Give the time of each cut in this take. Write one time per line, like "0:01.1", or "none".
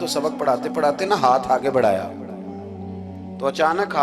none

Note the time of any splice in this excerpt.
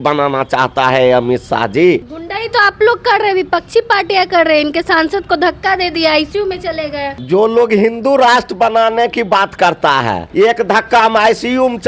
0:02.2
0:07.2
0:10.2

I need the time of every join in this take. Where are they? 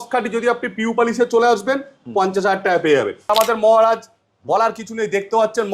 0:03.3

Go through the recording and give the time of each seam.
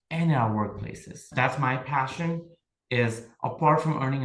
0:01.3

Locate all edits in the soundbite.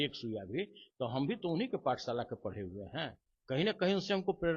none

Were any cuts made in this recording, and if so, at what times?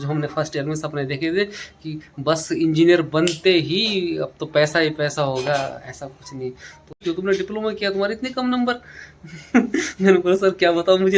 0:07.0

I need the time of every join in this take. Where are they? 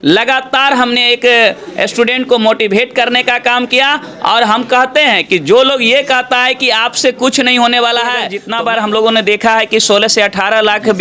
0:08.4

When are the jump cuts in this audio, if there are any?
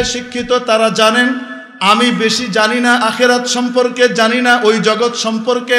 none

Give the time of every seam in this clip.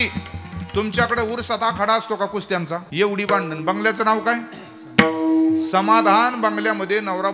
0:02.9

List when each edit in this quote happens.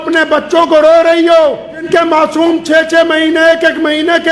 0:01.9

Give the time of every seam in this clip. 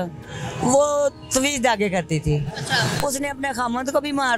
none

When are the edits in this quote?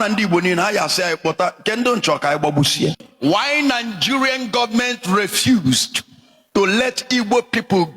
0:03.0

